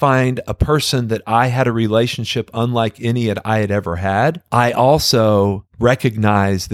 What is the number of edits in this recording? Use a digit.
2